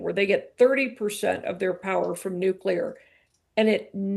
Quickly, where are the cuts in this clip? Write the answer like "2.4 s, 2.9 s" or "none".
none